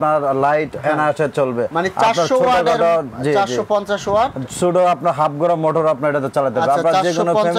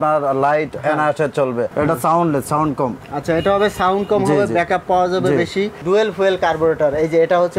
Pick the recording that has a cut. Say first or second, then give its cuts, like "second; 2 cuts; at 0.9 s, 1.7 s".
second; 2 cuts; at 1.7 s, 5.8 s